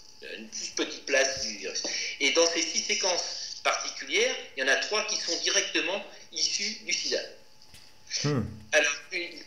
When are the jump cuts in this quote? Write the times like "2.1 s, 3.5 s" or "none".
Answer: none